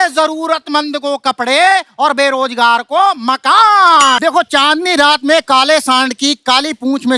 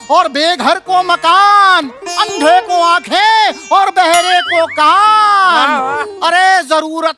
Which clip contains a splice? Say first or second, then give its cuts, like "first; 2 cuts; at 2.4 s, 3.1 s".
first; 1 cut; at 4.2 s